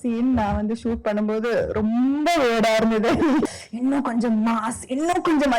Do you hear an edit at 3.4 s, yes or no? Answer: yes